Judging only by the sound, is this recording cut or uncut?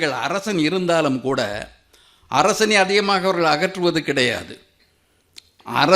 uncut